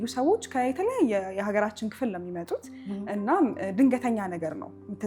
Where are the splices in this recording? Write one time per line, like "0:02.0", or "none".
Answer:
none